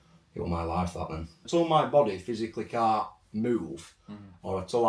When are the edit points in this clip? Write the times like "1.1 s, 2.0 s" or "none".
1.4 s